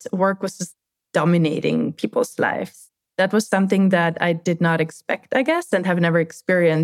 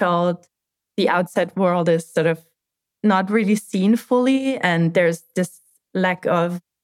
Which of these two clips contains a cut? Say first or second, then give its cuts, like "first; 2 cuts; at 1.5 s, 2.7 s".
first; 1 cut; at 2.8 s